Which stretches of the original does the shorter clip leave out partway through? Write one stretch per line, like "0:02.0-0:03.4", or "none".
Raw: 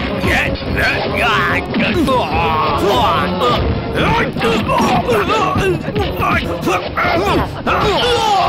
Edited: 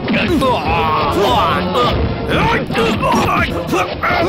0:04.9-0:06.2